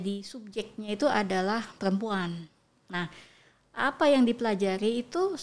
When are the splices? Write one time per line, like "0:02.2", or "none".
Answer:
none

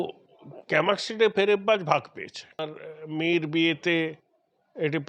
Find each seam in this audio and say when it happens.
0:02.8

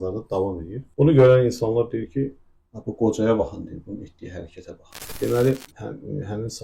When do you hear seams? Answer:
0:05.0

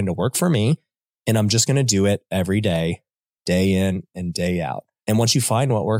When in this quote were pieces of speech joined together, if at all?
0:04.9

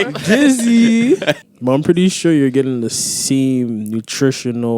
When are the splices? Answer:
0:01.5

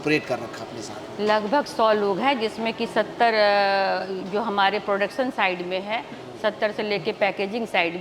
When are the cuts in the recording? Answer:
none

